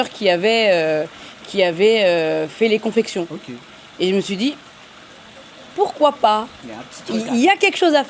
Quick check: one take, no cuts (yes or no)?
yes